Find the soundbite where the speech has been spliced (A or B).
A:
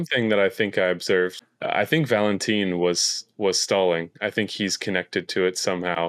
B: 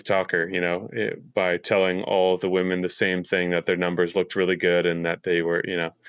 A